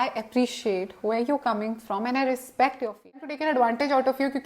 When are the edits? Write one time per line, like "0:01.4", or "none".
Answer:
0:03.3